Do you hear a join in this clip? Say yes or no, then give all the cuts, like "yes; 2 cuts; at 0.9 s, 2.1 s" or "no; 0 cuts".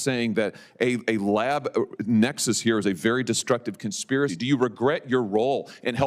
yes; 1 cut; at 4.3 s